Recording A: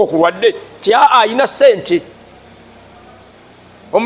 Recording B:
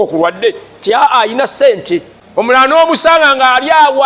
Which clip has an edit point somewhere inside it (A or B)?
B